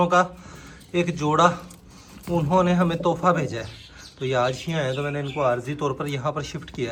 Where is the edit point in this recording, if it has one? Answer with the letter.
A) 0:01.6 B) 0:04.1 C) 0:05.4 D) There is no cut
D